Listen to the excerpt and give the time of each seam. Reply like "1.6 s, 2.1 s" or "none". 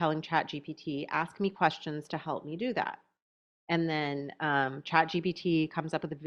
none